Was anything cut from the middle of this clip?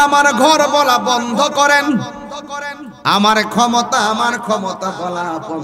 no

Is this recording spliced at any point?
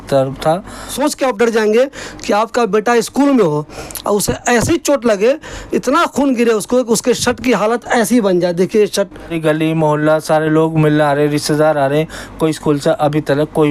yes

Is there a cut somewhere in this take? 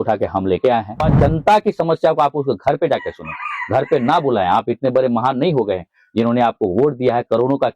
yes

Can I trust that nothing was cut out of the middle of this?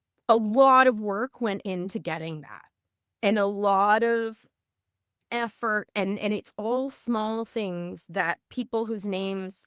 yes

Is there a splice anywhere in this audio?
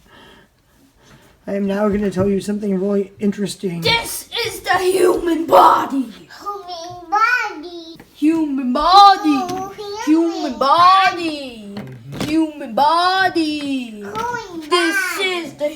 yes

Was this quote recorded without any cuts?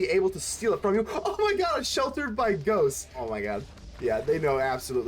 no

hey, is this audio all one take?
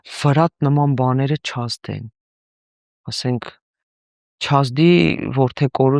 yes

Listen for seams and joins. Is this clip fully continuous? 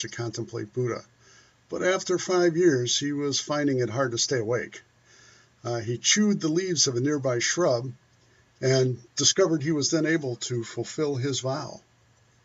no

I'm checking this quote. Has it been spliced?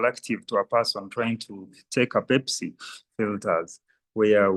yes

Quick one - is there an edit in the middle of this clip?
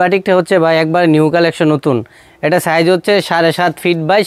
no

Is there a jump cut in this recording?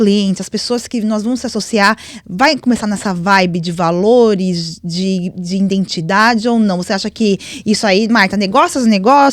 no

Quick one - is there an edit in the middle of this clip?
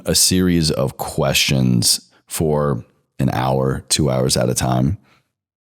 no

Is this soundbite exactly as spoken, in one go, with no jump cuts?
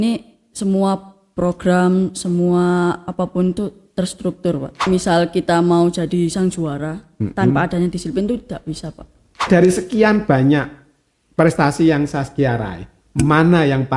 no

